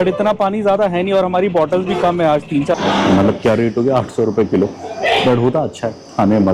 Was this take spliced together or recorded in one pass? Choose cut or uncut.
cut